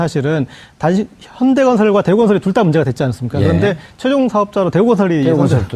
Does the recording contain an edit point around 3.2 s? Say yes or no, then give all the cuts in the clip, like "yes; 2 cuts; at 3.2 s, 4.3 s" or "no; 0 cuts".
no; 1 cut; at 4.7 s